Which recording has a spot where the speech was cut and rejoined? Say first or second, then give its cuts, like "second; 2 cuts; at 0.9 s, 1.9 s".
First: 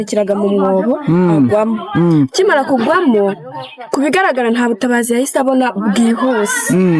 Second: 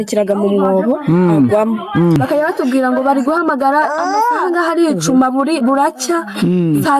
second; 1 cut; at 2.2 s